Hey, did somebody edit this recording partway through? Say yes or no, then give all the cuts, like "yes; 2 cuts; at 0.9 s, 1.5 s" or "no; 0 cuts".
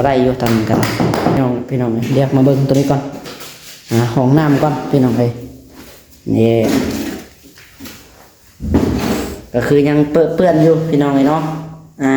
yes; 1 cut; at 1.4 s